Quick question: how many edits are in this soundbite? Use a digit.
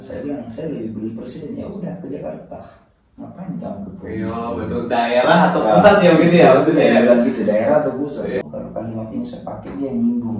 1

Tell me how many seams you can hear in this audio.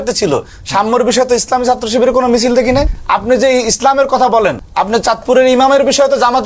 2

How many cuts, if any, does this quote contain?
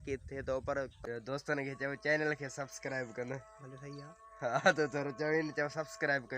1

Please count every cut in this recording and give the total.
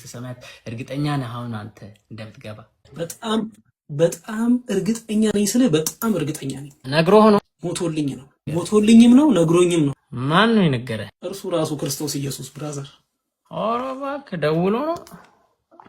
1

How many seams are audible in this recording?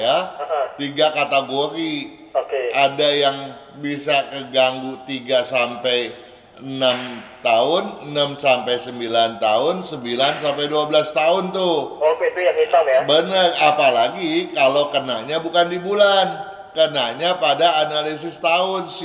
0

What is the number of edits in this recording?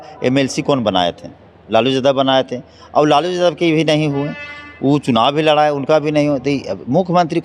0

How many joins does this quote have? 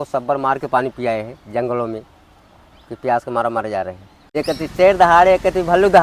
1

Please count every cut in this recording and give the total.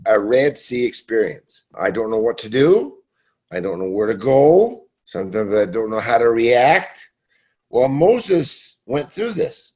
1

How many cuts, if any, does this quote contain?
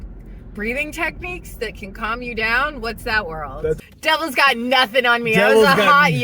1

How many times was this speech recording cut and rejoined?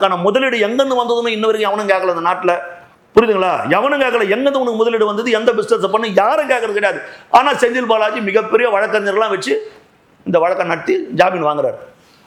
0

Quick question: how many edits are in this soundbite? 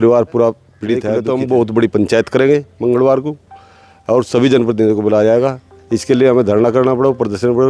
1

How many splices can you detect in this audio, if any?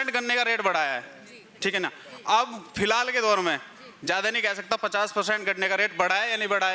0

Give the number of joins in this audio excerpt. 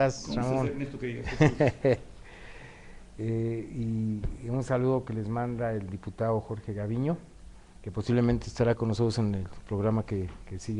0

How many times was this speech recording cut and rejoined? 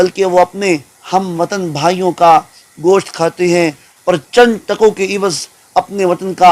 1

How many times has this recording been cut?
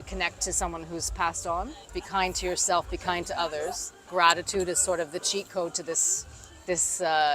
2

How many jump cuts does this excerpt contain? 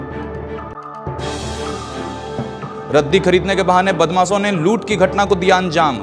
1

